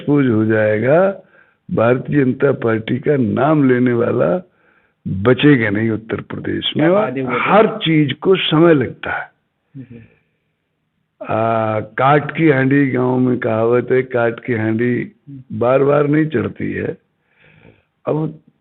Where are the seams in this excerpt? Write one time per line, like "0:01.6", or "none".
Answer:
0:07.1